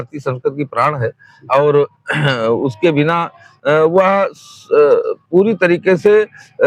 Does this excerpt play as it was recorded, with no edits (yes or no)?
yes